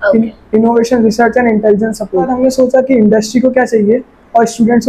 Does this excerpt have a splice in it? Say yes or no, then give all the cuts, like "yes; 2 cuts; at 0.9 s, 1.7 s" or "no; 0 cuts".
yes; 1 cut; at 2.3 s